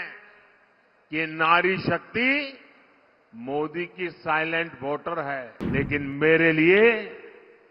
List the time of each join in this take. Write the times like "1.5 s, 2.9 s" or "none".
5.6 s